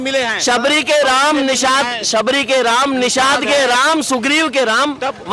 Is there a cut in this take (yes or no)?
no